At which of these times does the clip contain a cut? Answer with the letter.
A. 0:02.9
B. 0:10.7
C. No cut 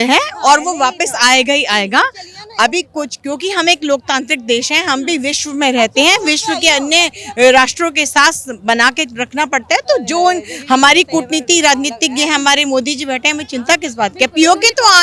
C